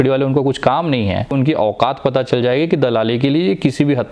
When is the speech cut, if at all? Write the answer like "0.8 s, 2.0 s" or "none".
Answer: 1.3 s